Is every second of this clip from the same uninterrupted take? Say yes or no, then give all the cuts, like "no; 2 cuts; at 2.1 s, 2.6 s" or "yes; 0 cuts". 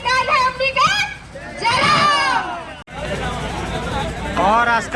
no; 1 cut; at 2.9 s